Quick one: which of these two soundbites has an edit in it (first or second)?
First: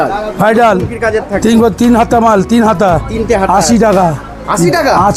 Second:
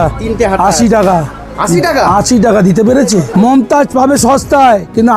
second